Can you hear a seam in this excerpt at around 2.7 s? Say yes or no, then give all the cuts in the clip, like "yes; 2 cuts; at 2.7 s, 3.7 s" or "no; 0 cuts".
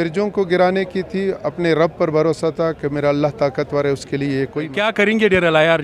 no; 1 cut; at 4.7 s